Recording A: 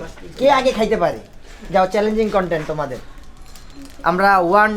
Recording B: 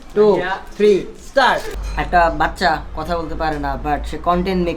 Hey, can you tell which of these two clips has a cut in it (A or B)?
B